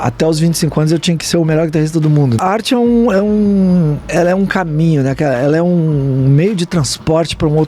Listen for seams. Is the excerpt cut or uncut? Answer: cut